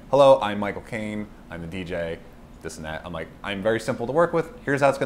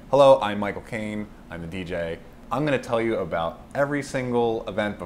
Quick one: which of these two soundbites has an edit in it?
second; 1 cut; at 2.4 s

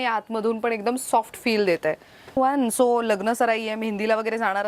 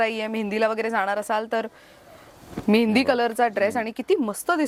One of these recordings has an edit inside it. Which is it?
first; 1 cut; at 2.4 s

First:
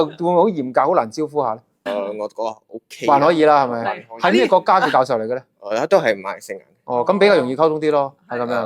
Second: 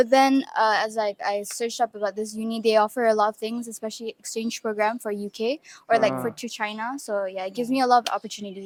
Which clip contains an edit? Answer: first; 1 cut; at 1.9 s

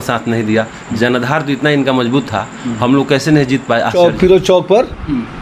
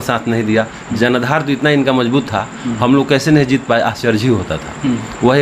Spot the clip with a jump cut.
first; 1 cut; at 3.9 s

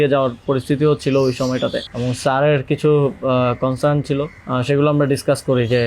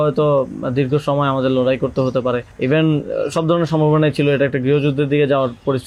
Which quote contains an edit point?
first; 1 cut; at 1.9 s

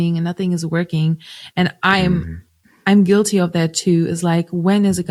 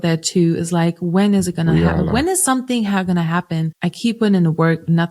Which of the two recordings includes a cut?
second; 1 cut; at 3.7 s

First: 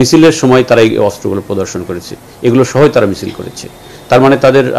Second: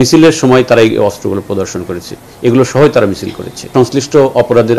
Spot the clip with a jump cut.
second; 1 cut; at 3.7 s

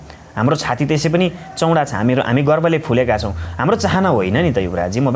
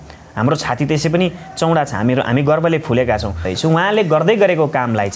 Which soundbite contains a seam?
second; 1 cut; at 3.5 s

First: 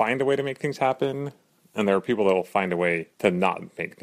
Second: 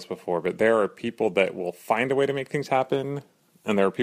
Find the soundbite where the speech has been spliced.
first; 1 cut; at 3.1 s

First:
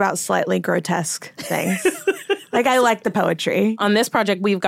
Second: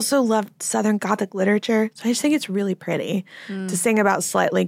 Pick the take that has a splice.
first; 1 cut; at 3.7 s

